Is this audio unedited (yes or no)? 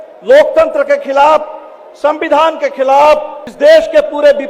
yes